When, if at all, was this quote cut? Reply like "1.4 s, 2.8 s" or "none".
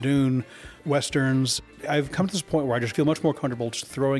1.6 s, 2.9 s